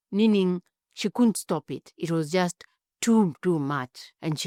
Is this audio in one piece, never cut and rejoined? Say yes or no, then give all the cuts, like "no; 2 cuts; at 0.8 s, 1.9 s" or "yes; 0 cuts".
yes; 0 cuts